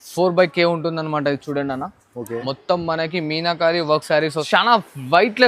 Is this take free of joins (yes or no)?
no